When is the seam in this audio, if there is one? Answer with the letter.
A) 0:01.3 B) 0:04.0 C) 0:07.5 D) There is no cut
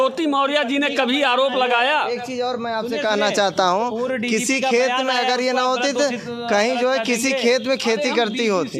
D